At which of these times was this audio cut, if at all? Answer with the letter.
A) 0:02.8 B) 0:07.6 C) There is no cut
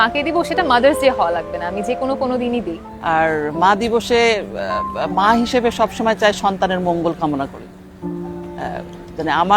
A